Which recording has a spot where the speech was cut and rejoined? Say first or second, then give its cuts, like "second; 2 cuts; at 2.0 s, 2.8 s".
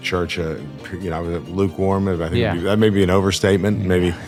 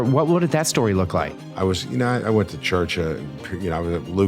second; 1 cut; at 1.1 s